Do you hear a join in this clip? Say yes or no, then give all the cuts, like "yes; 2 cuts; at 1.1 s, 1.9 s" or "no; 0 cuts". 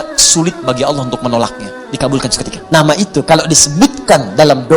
yes; 1 cut; at 2.5 s